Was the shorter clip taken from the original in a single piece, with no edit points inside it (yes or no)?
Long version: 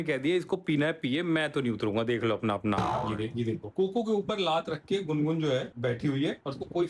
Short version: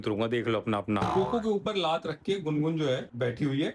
no